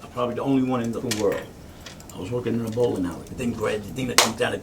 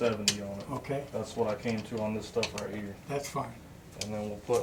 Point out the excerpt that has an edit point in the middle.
first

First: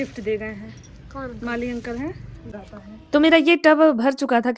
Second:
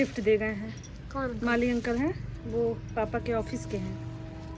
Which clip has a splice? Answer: first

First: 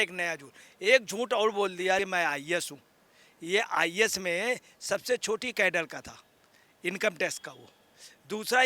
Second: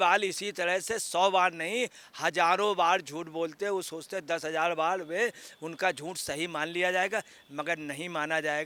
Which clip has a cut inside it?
first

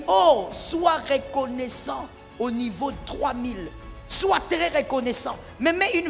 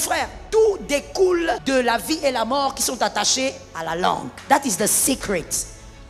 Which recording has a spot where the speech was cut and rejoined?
second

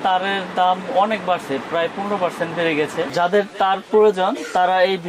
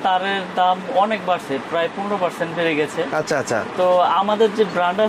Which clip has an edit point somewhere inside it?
first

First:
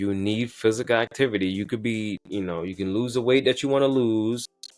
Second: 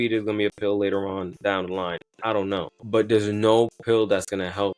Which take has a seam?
second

